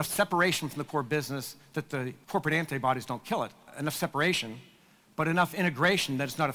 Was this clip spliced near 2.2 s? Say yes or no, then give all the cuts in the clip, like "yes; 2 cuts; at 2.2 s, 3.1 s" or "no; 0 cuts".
yes; 2 cuts; at 2.2 s, 3.7 s